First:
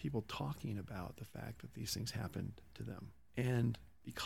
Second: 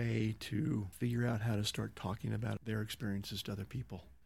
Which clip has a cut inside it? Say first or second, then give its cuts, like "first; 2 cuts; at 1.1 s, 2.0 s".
second; 1 cut; at 0.9 s